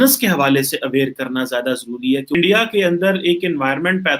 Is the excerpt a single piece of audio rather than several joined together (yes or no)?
no